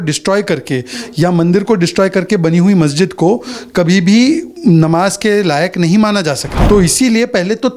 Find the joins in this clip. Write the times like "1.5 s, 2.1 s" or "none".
6.5 s